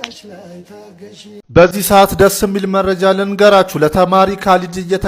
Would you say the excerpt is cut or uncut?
cut